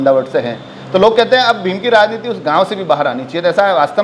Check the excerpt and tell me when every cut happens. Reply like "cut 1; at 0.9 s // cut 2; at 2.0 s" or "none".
none

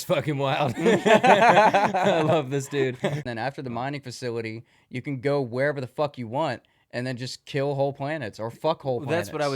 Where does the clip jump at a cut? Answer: cut 1; at 3.2 s

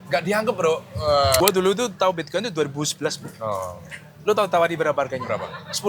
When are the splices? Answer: cut 1; at 1.4 s

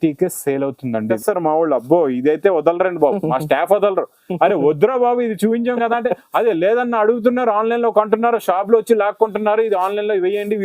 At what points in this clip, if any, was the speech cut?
cut 1; at 1.2 s

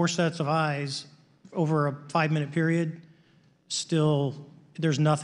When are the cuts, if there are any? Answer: none

